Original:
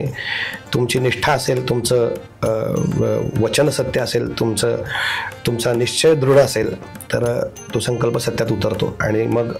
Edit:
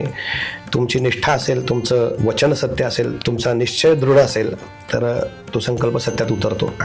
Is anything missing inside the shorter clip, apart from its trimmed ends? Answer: yes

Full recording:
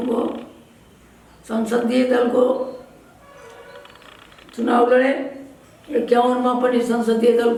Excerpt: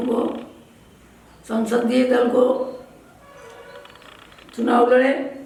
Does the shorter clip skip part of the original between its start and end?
no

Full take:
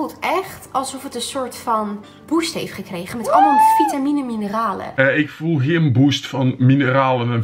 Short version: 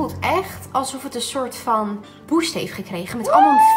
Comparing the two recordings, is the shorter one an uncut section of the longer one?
yes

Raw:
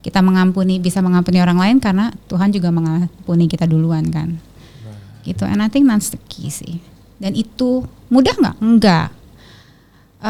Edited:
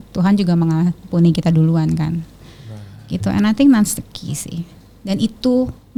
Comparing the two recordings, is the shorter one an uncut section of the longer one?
yes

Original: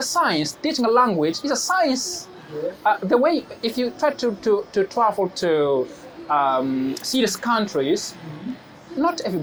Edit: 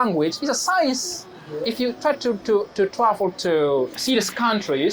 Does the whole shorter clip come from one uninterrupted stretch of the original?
no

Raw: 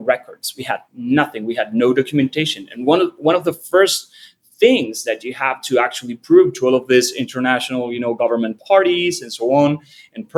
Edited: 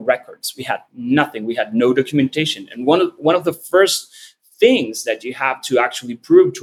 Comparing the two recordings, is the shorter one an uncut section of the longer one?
yes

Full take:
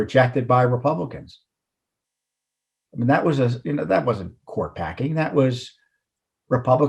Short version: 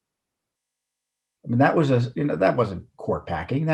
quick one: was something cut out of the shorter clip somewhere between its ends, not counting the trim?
no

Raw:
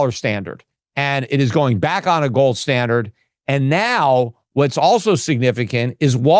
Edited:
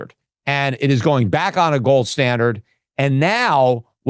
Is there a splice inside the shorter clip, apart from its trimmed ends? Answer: no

